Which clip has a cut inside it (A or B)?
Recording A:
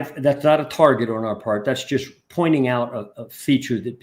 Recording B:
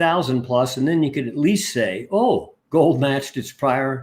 B